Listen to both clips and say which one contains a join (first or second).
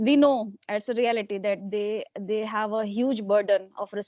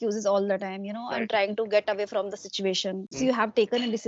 second